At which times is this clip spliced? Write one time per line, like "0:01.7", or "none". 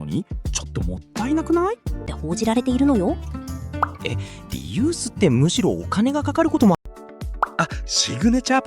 0:02.1
0:06.8

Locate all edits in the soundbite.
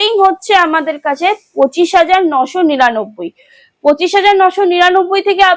none

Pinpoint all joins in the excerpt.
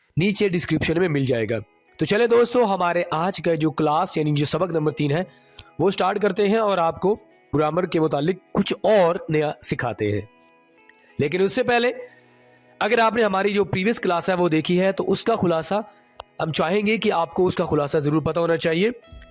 0:07.5

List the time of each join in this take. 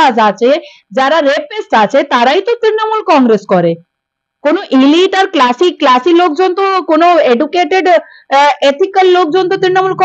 none

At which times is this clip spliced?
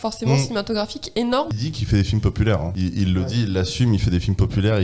0:01.5
0:02.7

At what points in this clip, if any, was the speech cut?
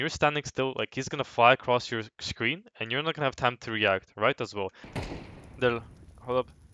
0:04.9

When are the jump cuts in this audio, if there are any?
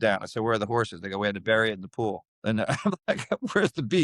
none

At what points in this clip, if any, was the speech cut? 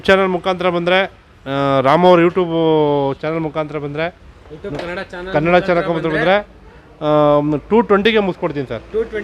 none

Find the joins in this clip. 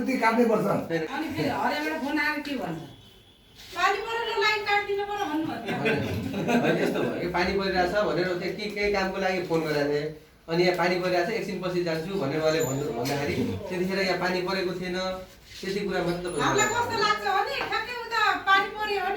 0:01.1

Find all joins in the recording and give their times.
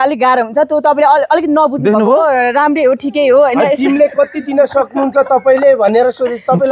none

